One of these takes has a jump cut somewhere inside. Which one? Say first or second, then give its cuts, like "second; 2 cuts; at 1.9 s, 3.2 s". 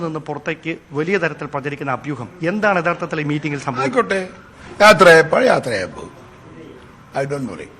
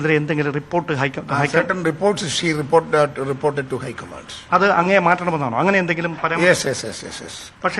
second; 1 cut; at 6.1 s